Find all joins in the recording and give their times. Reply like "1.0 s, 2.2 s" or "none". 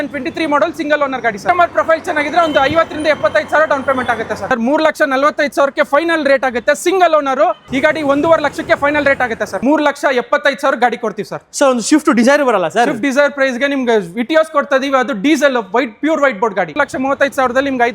1.4 s, 4.5 s, 7.6 s, 9.6 s, 16.7 s